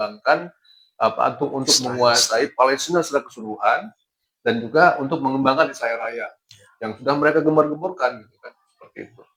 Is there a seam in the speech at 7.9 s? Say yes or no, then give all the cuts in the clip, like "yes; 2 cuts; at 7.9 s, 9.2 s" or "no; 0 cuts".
no; 0 cuts